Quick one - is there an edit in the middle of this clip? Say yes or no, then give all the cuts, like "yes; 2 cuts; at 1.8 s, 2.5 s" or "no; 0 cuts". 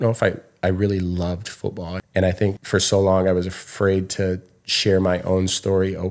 yes; 2 cuts; at 1.9 s, 2.6 s